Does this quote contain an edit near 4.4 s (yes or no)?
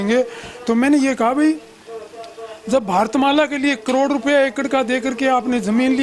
no